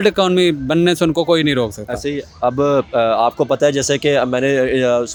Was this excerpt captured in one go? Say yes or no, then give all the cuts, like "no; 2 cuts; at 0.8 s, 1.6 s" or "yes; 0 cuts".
yes; 0 cuts